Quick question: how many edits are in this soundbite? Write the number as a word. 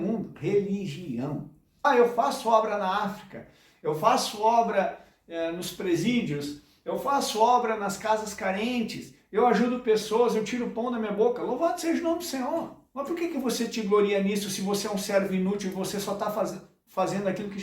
one